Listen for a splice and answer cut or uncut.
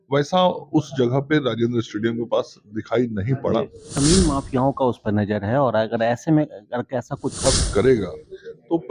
cut